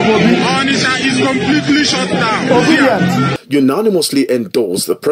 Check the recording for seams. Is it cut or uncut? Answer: cut